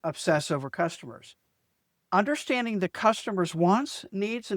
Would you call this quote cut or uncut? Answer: cut